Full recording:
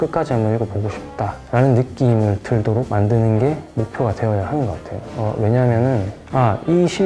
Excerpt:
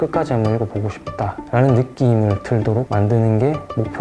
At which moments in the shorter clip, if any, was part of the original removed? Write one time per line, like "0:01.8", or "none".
none